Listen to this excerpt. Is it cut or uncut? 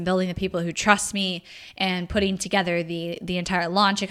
uncut